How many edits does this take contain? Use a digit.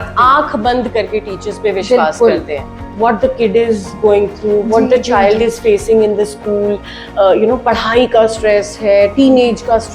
1